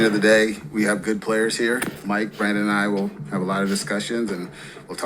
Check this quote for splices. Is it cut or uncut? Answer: cut